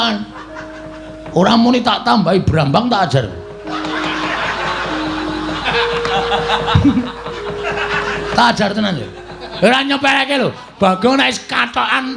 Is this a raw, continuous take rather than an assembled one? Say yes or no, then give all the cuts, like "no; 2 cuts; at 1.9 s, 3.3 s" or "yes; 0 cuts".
yes; 0 cuts